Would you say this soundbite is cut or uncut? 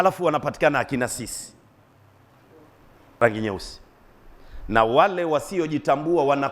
cut